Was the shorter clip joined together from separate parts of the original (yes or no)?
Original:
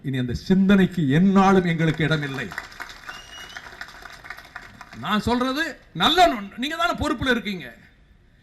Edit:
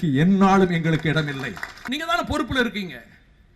yes